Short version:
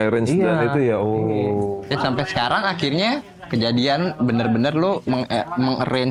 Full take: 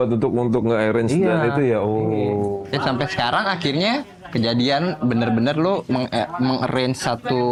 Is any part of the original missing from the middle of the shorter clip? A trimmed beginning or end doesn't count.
no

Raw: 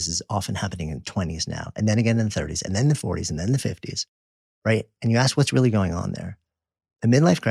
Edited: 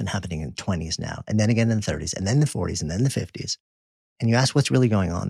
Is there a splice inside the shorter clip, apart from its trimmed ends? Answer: yes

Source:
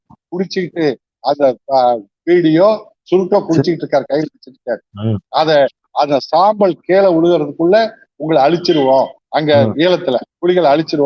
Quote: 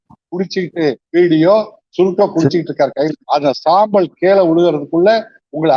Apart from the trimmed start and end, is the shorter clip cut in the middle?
yes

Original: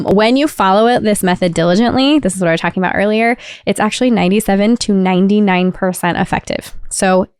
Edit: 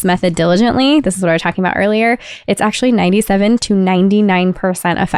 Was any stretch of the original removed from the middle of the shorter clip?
no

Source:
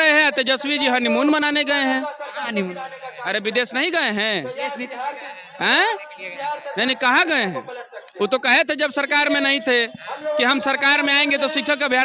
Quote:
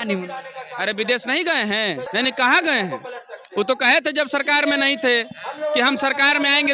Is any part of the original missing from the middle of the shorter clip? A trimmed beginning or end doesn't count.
yes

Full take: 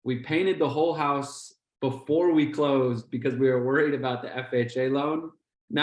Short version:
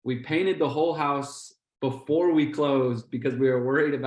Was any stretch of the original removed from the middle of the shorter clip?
no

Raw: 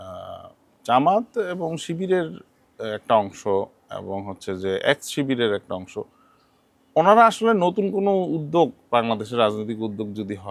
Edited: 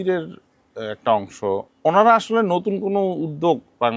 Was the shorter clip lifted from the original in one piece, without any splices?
no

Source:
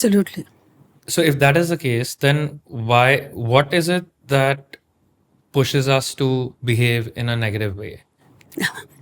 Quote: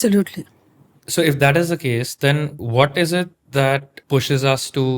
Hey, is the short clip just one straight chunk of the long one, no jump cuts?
no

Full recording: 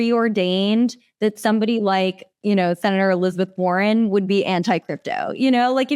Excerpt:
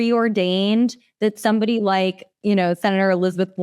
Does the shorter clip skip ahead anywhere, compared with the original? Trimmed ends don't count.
no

